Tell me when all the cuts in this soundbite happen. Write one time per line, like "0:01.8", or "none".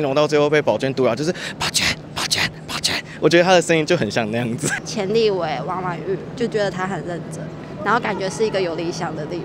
none